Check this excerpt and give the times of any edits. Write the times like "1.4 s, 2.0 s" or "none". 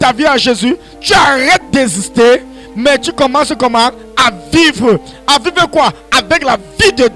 none